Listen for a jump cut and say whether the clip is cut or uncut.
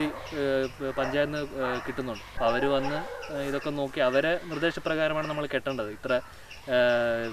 cut